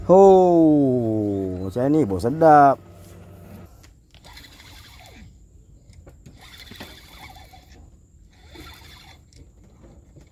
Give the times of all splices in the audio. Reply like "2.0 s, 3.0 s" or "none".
none